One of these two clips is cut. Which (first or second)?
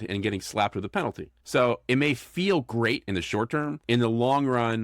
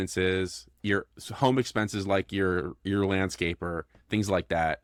first